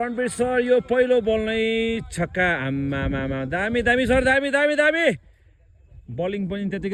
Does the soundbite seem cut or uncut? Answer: uncut